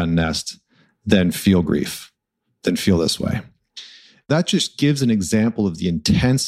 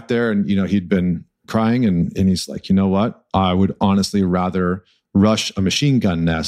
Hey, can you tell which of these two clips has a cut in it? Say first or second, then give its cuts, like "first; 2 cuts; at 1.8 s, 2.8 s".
first; 1 cut; at 4.3 s